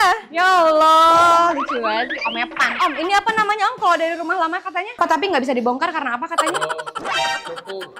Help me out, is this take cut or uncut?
uncut